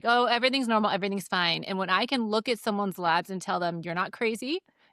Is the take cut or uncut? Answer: uncut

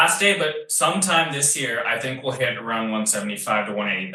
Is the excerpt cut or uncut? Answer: uncut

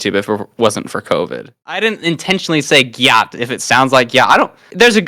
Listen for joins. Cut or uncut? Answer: cut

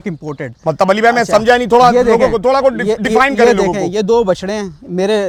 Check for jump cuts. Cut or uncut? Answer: uncut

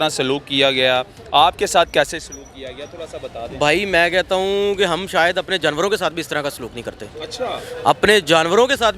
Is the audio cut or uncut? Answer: uncut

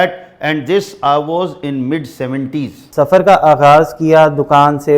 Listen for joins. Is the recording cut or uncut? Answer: cut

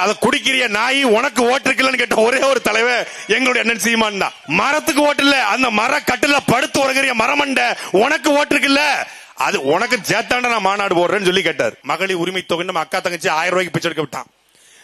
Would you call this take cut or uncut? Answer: cut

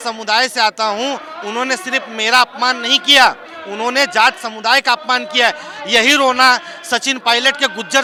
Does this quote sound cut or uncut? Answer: uncut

